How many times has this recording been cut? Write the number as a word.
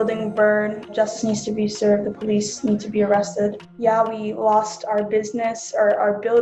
two